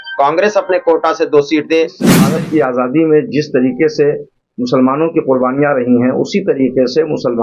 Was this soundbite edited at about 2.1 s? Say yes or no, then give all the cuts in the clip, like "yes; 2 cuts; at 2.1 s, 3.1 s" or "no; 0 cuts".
yes; 1 cut; at 2.1 s